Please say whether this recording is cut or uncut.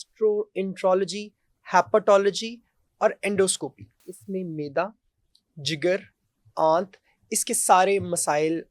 cut